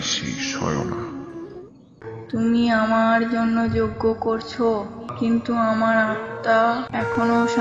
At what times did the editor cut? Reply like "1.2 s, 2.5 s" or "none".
1.6 s